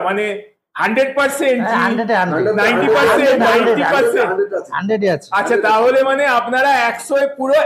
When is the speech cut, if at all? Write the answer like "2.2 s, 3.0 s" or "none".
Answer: none